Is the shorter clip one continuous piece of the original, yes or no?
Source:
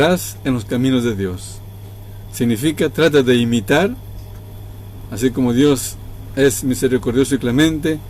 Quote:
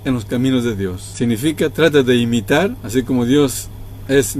no